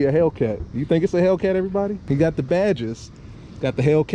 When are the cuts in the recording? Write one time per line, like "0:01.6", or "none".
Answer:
0:02.0